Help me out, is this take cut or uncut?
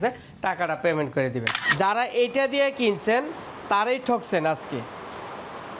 cut